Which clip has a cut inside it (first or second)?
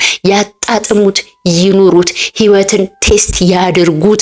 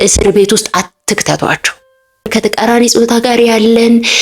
second